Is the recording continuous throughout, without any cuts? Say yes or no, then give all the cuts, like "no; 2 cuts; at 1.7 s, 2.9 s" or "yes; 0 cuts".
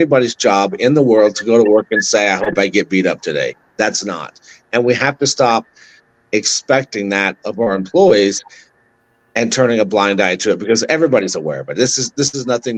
yes; 0 cuts